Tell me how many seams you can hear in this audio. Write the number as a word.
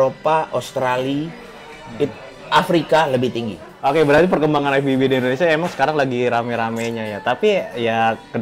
one